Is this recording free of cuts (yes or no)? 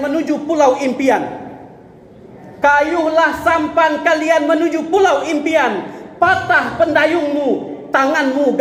yes